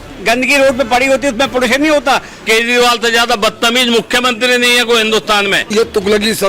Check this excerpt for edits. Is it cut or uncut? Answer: cut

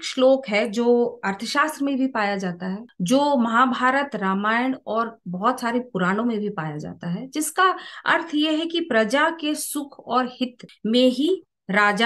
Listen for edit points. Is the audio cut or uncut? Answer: uncut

